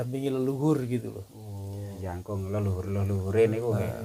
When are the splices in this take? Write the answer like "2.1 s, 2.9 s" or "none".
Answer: 2.0 s

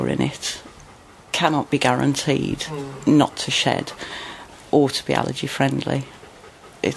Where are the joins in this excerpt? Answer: 4.5 s, 6.2 s

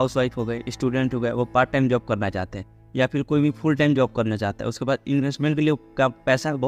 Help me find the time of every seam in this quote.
none

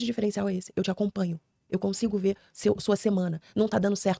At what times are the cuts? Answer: none

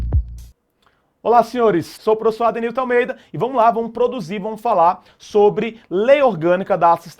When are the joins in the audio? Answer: 1.9 s

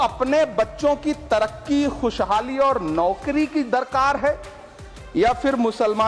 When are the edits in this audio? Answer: none

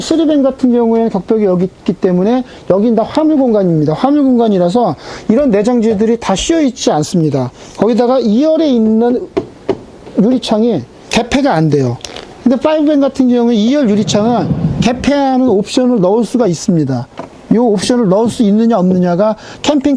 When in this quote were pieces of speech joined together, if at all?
none

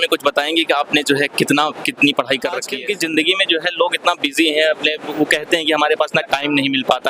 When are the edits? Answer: 2.8 s

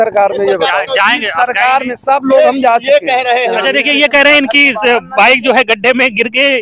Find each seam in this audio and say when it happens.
3.5 s

